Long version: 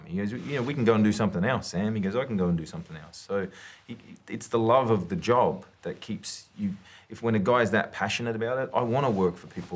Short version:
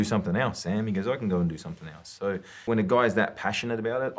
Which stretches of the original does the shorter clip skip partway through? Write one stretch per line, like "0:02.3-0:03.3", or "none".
0:03.6-0:07.1